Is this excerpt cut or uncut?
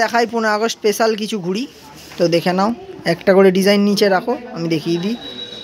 uncut